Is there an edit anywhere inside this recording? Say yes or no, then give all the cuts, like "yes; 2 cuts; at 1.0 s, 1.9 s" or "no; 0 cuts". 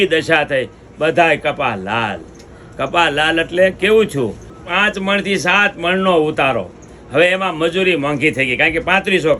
yes; 1 cut; at 4.5 s